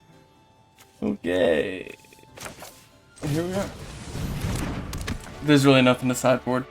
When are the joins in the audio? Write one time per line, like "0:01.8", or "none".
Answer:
0:05.2

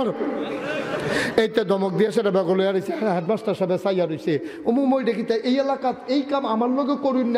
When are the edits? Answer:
none

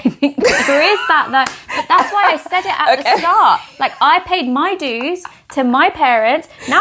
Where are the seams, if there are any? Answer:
none

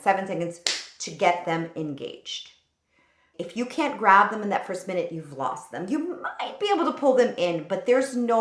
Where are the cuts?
0:03.3

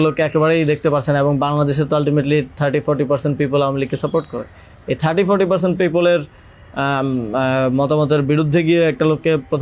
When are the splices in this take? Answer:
none

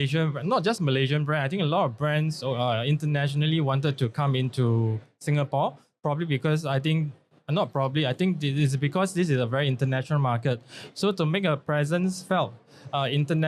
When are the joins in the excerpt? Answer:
none

